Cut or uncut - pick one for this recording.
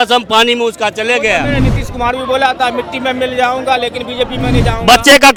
uncut